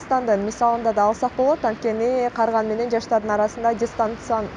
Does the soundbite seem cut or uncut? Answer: uncut